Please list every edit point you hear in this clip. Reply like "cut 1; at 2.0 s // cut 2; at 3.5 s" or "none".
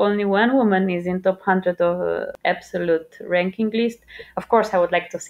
cut 1; at 2.3 s